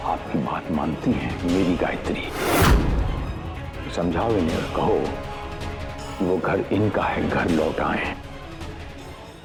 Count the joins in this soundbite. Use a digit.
0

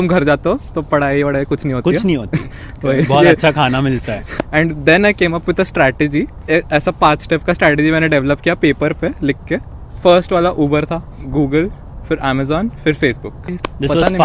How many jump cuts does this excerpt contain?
4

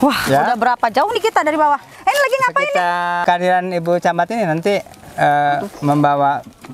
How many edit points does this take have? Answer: 1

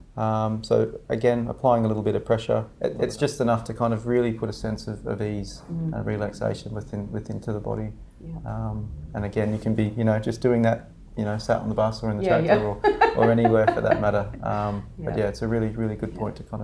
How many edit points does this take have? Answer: 1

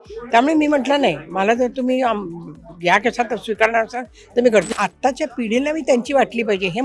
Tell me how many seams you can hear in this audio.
1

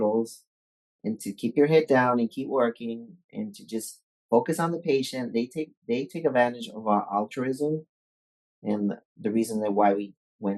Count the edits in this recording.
0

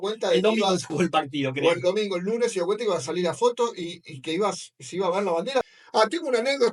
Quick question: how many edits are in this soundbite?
1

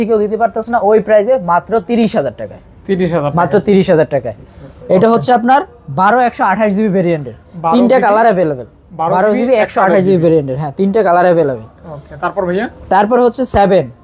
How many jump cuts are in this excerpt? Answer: 0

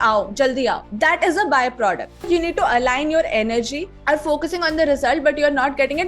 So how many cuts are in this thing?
3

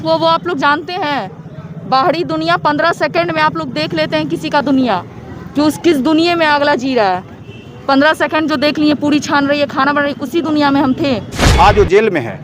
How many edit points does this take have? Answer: 1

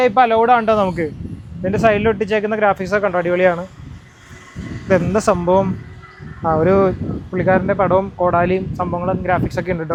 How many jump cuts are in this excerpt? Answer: 0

